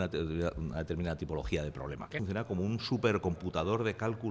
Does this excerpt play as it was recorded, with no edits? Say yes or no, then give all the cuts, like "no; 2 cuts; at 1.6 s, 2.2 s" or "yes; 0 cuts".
no; 1 cut; at 2.2 s